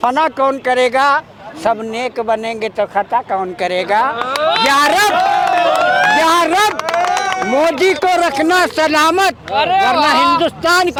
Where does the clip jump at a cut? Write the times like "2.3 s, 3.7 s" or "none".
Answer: none